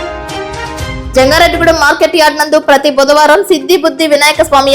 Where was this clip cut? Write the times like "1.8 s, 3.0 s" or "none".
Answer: 1.0 s